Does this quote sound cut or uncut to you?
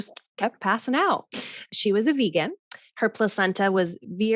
cut